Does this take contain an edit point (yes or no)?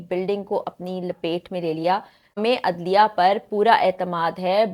yes